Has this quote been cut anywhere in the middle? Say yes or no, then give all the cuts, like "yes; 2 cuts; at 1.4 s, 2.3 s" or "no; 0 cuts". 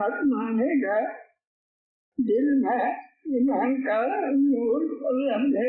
no; 0 cuts